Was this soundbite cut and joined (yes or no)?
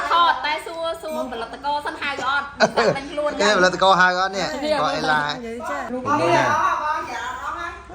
yes